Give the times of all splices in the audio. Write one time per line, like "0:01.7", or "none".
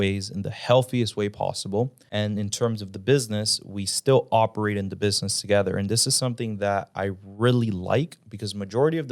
0:02.0